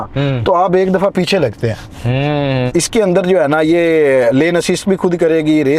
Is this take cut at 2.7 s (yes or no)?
yes